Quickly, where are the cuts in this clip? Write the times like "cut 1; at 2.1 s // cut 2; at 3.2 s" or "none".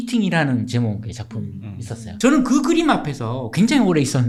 none

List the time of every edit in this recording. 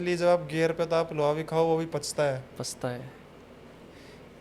none

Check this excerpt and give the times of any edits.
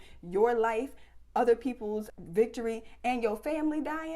cut 1; at 2.1 s

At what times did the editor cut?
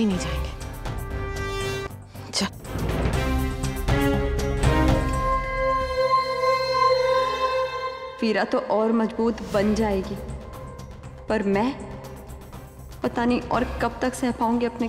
cut 1; at 1.9 s // cut 2; at 5.0 s

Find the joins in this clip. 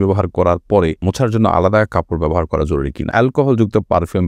cut 1; at 1.0 s // cut 2; at 3.1 s

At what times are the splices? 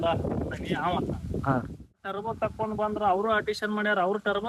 cut 1; at 2.1 s

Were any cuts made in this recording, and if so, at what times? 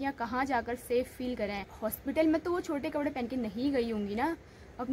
cut 1; at 1.7 s

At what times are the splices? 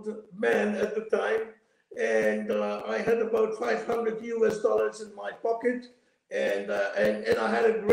none

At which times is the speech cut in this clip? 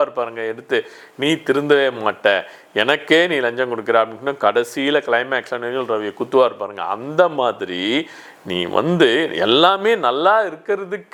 none

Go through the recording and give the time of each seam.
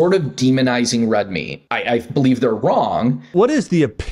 cut 1; at 1.6 s // cut 2; at 3.3 s

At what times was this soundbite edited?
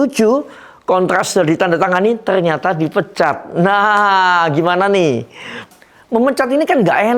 cut 1; at 5.6 s

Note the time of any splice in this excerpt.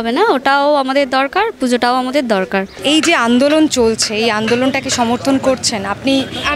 none

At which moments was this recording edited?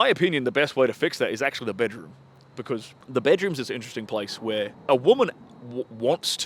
cut 1; at 3.0 s // cut 2; at 4.8 s

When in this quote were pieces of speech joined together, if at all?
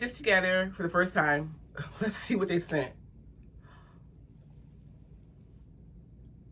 none

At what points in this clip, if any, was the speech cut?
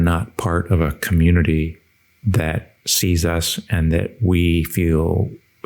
none

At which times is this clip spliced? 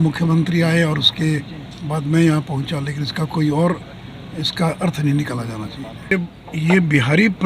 cut 1; at 6.1 s

